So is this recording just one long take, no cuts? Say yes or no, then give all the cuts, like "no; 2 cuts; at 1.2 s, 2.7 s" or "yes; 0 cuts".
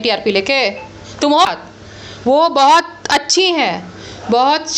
no; 1 cut; at 1.5 s